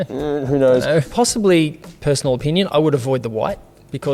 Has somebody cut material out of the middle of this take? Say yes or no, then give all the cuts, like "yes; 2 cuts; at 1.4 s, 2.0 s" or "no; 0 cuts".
yes; 1 cut; at 1.1 s